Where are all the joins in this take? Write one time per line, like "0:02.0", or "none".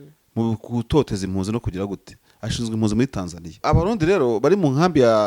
0:03.6

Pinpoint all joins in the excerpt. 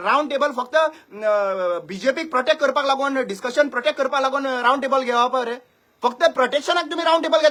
none

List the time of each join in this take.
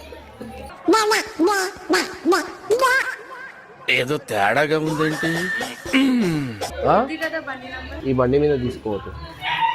0:07.9

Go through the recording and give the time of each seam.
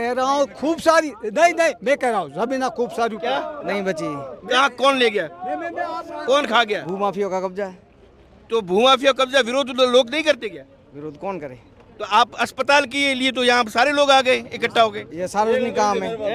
none

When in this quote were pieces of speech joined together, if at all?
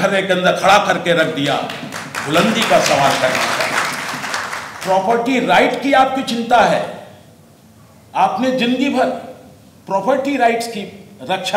0:04.7

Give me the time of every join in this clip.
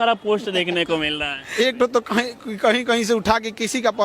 0:01.4

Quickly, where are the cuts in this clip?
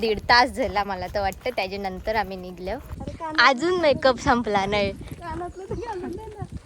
0:03.0

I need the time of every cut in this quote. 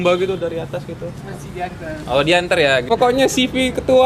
0:02.8

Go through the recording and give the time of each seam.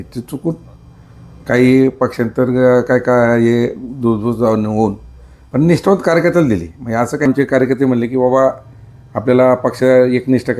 0:07.3

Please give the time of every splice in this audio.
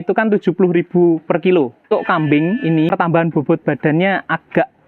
0:01.9
0:02.9

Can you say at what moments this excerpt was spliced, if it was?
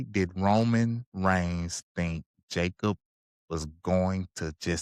none

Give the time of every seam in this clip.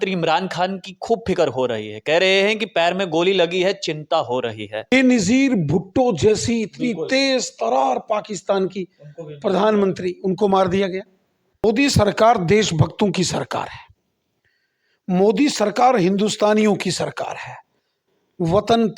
0:04.9
0:11.6

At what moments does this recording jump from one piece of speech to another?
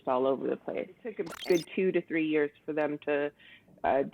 0:01.3

